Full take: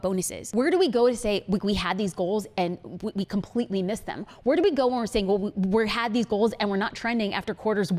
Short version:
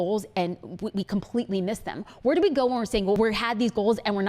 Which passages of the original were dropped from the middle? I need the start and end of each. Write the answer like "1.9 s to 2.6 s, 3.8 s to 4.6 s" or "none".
5.4 s to 5.7 s

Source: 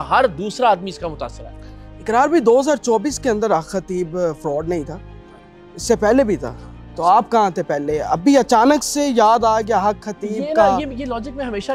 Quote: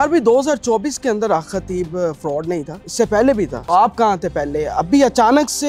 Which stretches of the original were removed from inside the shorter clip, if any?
5.0 s to 5.7 s, 6.5 s to 6.9 s

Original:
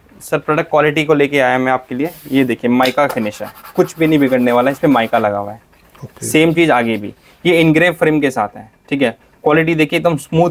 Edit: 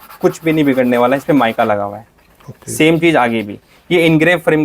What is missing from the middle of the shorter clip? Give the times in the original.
none

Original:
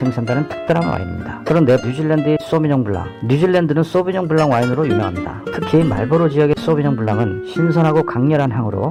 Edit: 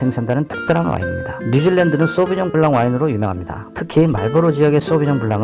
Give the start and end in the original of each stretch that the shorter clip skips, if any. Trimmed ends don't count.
1.3 s to 3.1 s

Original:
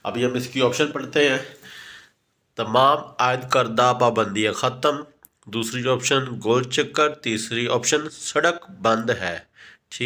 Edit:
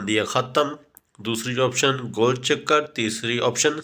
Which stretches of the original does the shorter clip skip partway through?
none

